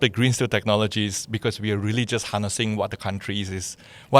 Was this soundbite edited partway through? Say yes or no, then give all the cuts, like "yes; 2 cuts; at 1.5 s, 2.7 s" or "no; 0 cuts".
no; 0 cuts